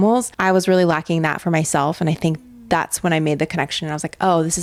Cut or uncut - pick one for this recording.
uncut